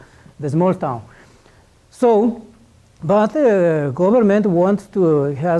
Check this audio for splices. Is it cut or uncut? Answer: uncut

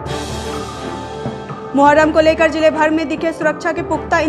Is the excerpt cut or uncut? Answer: uncut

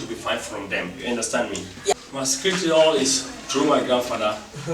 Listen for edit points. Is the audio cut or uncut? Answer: cut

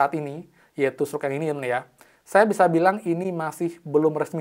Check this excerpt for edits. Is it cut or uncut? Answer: uncut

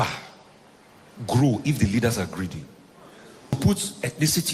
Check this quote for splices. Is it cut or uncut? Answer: cut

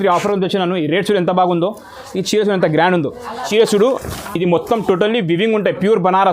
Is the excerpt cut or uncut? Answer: cut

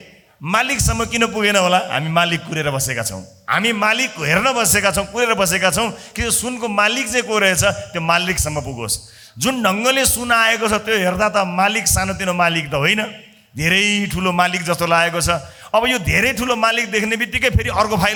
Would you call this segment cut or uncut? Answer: uncut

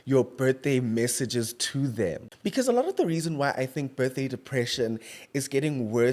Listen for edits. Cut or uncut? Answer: cut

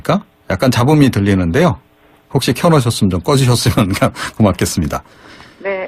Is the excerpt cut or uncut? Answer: uncut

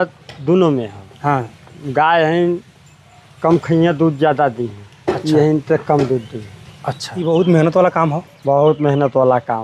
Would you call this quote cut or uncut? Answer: cut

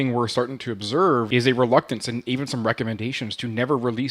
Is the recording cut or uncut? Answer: cut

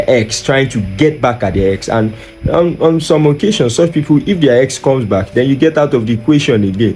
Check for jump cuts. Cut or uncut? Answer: uncut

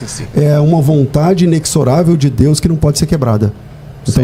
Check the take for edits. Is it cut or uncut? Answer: uncut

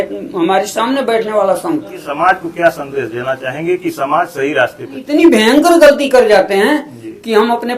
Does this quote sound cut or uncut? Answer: cut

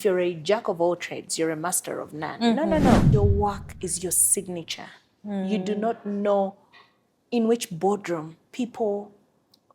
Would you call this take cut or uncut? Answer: cut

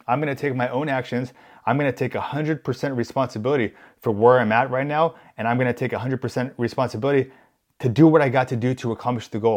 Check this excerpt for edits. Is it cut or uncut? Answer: uncut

